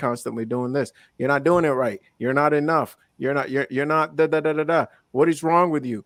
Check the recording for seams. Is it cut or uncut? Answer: uncut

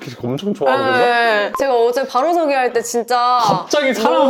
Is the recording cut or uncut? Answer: cut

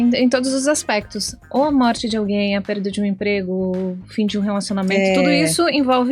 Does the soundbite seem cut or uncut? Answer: uncut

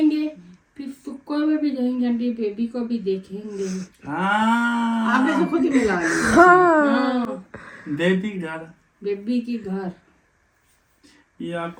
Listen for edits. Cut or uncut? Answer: uncut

